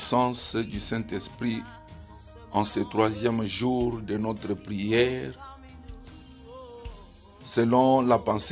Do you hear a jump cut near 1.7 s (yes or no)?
no